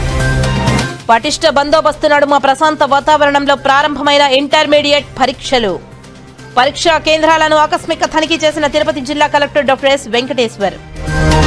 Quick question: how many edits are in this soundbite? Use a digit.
1